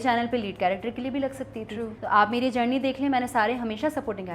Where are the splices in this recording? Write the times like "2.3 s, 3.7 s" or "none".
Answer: 2.0 s